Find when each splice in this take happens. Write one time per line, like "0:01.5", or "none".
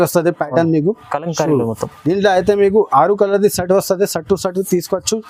none